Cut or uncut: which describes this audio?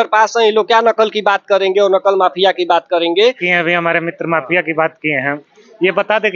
cut